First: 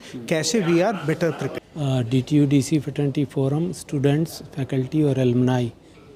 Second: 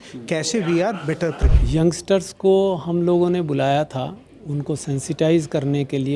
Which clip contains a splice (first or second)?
second